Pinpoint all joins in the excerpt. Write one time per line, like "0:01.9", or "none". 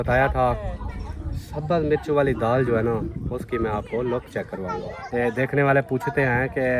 0:05.0